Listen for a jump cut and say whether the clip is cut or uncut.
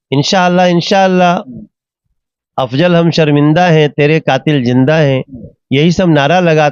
cut